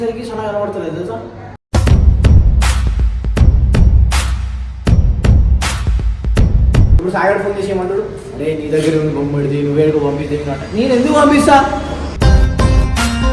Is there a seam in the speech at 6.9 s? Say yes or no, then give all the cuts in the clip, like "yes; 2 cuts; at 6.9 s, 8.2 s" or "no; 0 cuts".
yes; 1 cut; at 6.9 s